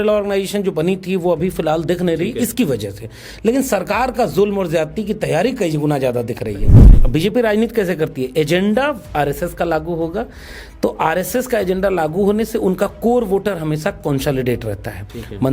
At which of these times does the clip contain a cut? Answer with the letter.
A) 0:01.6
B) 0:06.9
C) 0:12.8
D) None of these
B